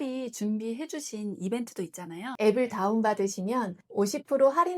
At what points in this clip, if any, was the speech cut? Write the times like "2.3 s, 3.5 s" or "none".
2.3 s